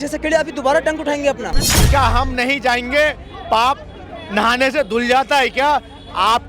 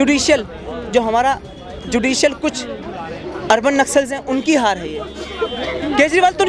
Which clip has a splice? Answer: first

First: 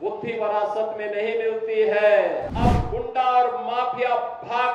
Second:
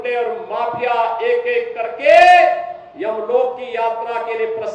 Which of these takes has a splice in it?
first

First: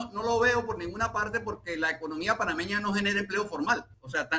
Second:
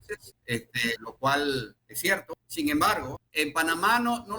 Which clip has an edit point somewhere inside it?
second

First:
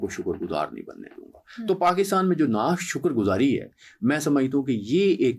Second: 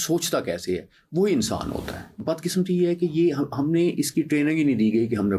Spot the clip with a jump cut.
second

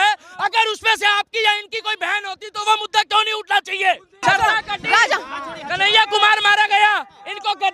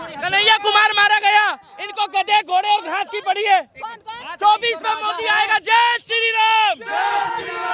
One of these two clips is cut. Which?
first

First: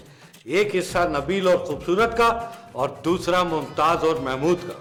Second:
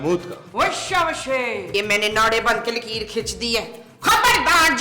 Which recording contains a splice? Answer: second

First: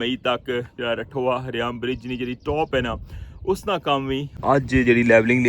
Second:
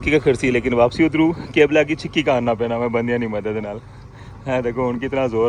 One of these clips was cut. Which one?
first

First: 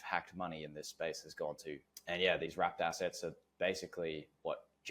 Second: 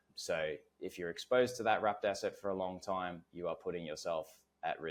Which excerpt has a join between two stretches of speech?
first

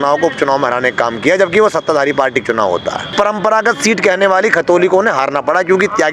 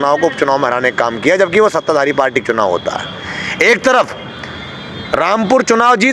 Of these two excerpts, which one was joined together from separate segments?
first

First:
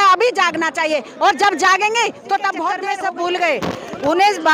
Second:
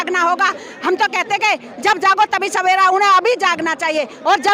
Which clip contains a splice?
first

